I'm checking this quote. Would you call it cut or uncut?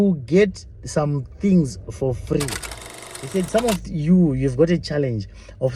cut